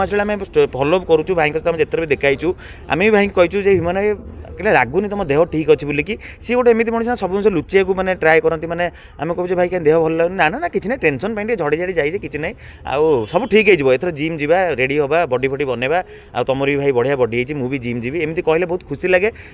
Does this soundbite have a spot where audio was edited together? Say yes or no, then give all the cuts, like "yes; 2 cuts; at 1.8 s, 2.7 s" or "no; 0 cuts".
no; 0 cuts